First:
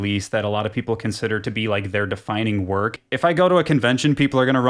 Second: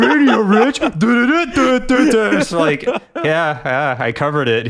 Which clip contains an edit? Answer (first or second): first